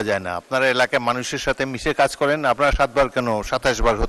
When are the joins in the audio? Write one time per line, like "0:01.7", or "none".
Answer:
none